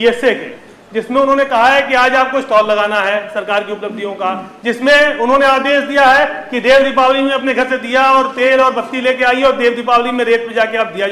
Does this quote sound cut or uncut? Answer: uncut